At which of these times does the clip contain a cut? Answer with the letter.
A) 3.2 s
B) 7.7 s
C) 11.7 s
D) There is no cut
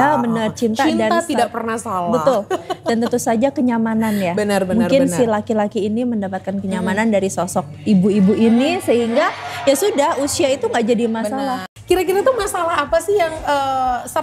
C